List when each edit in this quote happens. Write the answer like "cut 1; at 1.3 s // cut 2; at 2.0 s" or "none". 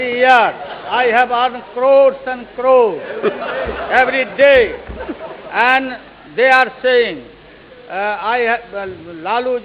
none